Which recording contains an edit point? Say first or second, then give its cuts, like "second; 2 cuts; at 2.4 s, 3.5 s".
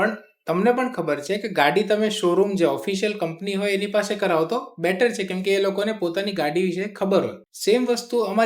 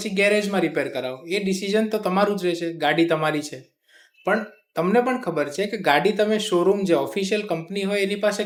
first; 1 cut; at 7.4 s